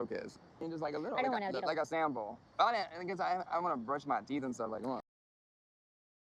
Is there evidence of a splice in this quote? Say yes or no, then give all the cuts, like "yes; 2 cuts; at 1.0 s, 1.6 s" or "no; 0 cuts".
no; 0 cuts